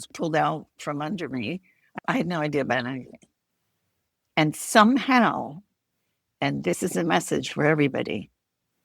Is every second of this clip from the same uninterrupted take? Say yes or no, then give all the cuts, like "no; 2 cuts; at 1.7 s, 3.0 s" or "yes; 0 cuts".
no; 1 cut; at 1.8 s